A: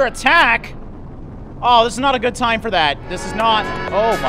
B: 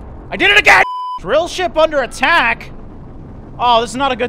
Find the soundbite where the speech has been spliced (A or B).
B